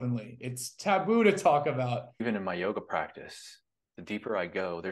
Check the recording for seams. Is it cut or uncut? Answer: cut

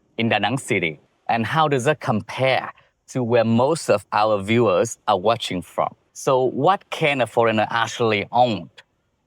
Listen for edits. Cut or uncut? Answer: cut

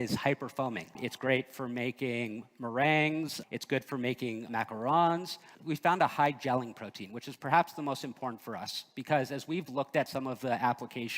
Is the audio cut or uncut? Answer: cut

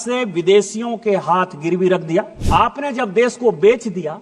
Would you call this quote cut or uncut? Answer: cut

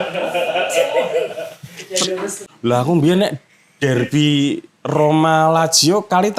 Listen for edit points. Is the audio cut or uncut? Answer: cut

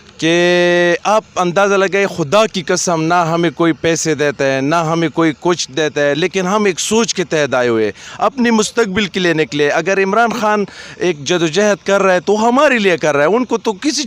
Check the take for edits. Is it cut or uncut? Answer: uncut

